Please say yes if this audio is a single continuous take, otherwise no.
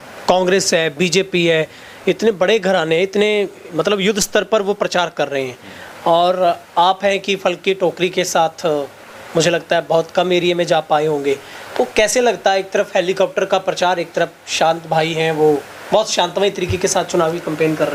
yes